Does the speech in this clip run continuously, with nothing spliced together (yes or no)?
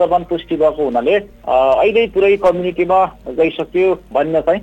yes